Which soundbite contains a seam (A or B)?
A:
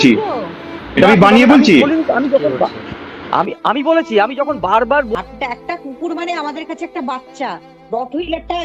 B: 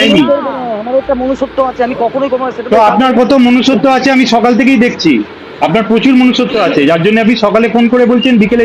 A